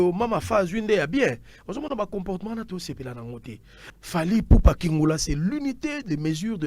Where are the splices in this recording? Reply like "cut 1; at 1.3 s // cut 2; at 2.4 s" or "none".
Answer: cut 1; at 3.9 s